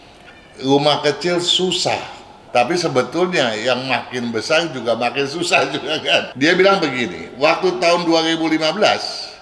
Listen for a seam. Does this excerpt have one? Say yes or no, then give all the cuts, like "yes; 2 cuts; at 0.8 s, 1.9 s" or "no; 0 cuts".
yes; 2 cuts; at 2.3 s, 6.3 s